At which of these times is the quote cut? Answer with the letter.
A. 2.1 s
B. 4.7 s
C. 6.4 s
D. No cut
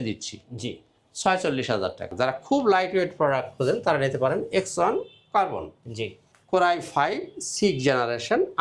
A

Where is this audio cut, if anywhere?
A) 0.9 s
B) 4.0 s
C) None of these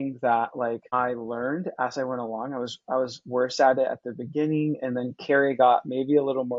A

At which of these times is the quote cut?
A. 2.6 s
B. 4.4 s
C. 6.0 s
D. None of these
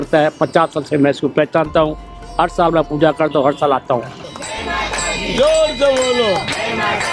B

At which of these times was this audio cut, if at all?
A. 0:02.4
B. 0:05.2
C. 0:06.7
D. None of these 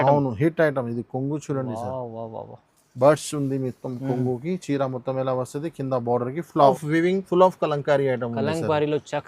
C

